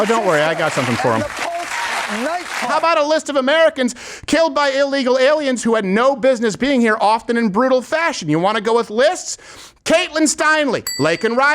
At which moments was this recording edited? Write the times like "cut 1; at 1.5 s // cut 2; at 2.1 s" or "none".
cut 1; at 2.7 s